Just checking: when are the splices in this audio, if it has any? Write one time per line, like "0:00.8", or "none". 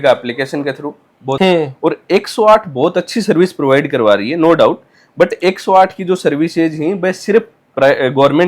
0:01.4